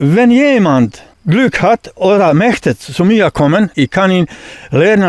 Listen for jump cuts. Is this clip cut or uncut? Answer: cut